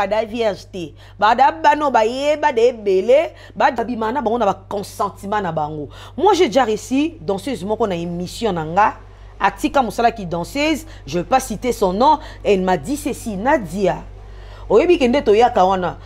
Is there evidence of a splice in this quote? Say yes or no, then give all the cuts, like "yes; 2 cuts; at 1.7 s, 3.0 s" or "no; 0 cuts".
yes; 1 cut; at 3.8 s